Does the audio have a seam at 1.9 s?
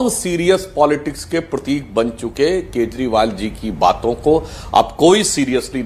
no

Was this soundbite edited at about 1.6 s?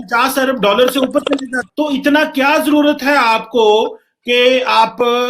yes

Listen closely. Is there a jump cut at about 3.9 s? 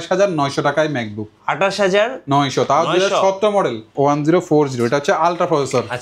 yes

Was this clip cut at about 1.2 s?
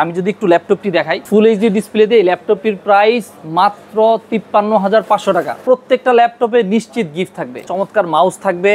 yes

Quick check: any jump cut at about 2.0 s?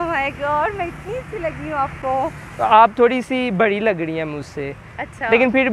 no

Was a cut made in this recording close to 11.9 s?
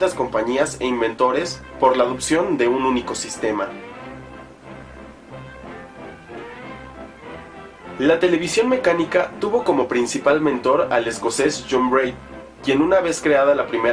no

